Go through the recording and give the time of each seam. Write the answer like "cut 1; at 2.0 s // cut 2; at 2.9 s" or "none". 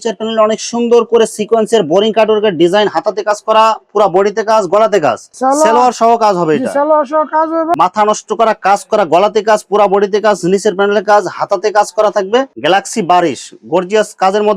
cut 1; at 5.3 s // cut 2; at 7.7 s // cut 3; at 12.5 s